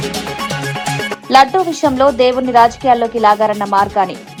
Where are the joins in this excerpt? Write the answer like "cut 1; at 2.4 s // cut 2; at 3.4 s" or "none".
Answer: none